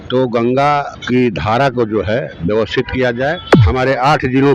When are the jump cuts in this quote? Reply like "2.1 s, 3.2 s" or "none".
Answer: 0.9 s, 3.5 s

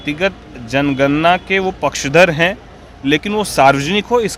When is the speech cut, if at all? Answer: none

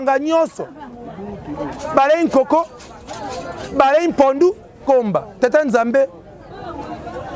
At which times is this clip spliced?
4.8 s

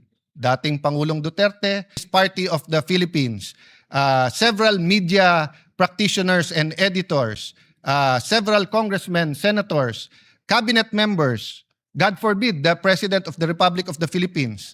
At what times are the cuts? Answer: 2.0 s

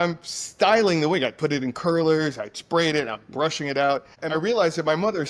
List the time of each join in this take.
4.2 s

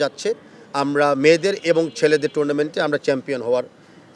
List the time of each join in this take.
none

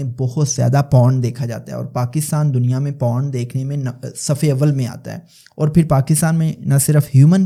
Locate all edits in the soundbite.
none

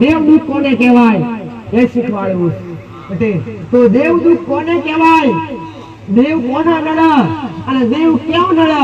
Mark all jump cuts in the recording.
none

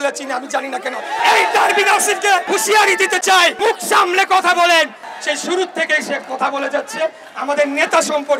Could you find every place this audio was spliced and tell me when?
1.2 s, 2.4 s, 3.6 s, 5.1 s

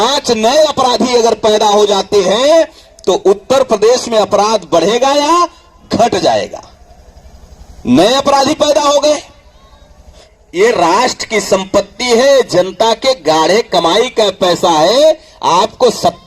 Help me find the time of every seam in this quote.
10.1 s

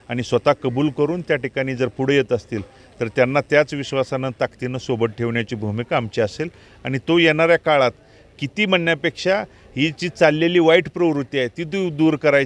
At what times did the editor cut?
none

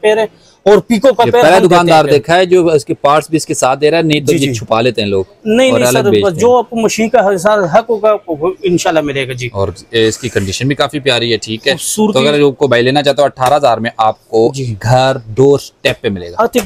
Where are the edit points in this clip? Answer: none

